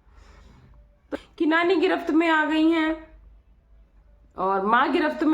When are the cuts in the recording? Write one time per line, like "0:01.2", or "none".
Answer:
0:01.1